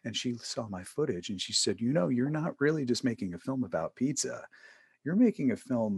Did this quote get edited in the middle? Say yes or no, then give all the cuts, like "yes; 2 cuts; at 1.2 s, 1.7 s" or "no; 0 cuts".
no; 0 cuts